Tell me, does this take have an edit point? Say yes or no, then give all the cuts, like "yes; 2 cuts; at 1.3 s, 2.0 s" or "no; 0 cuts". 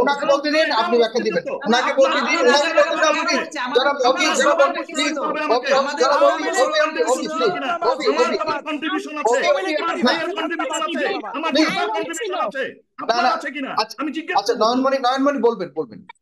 no; 0 cuts